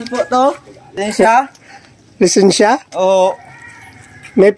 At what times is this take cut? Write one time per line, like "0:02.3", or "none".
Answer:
0:01.0